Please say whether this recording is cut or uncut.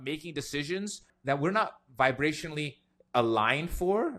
cut